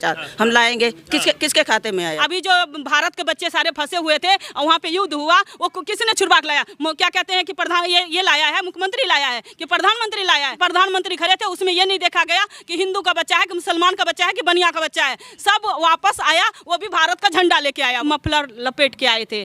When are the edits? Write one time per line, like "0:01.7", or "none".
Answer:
0:02.2
0:10.6
0:18.0